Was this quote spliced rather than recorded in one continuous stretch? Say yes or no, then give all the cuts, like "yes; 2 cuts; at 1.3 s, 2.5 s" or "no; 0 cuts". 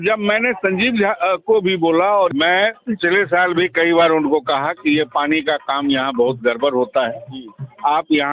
yes; 1 cut; at 2.3 s